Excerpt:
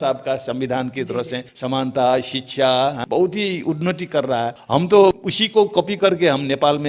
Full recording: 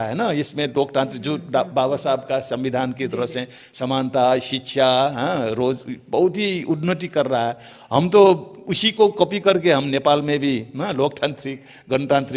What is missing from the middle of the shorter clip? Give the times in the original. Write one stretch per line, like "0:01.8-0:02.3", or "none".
0:03.5-0:03.6
0:05.2-0:06.0
0:07.6-0:07.8
0:08.5-0:08.8